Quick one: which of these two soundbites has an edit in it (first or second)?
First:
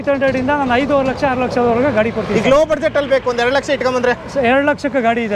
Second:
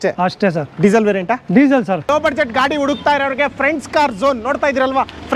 second